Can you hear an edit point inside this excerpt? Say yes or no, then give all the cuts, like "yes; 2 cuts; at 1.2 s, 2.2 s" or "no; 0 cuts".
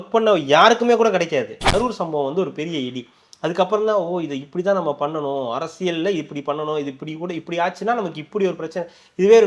yes; 1 cut; at 1.7 s